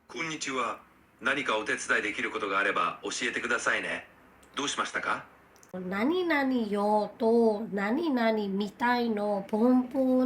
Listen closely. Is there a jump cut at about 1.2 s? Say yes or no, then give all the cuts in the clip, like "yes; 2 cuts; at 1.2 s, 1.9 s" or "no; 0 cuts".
no; 1 cut; at 5.7 s